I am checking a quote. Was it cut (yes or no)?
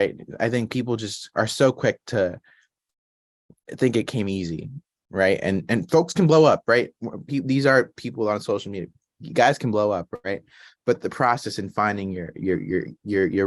no